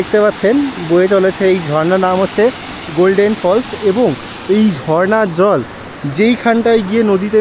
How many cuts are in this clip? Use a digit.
1